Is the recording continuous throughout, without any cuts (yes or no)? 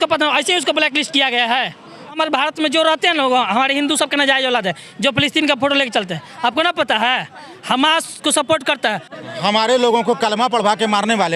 no